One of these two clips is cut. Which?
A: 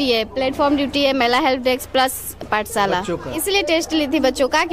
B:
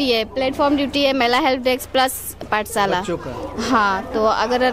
A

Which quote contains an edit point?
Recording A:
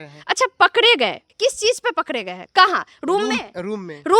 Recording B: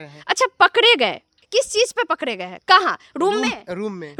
A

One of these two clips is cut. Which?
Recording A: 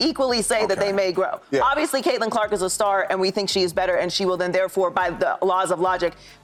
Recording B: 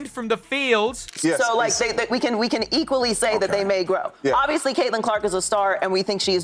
B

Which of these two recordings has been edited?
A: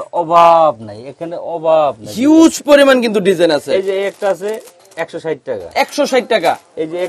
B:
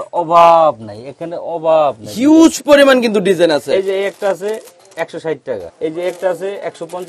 B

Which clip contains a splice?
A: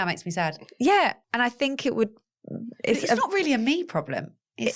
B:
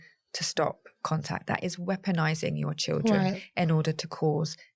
A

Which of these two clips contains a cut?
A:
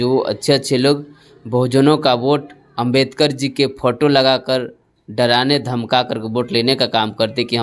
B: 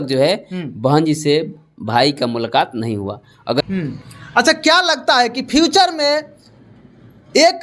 B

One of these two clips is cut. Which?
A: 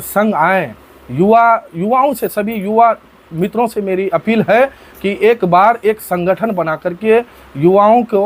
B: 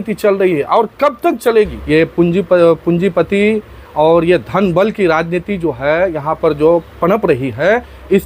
B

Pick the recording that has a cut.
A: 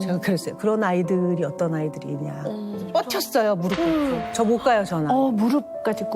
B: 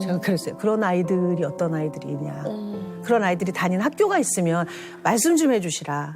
A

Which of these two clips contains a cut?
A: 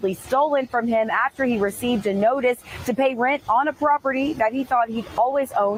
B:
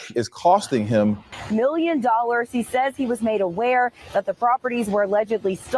B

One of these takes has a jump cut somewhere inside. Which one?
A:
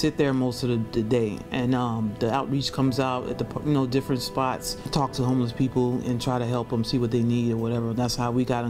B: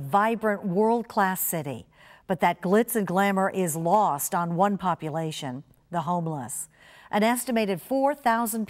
A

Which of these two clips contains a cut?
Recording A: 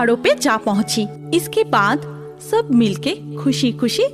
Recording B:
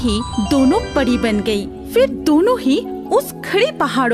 A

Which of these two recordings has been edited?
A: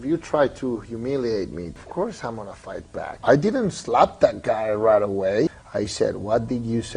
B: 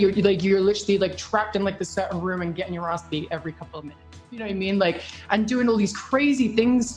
A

